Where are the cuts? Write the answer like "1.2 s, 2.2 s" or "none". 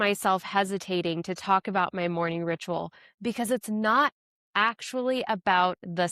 none